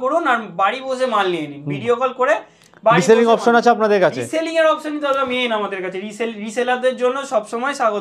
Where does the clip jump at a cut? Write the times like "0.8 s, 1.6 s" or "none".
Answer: none